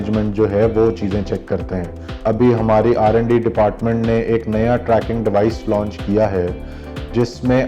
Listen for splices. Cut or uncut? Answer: cut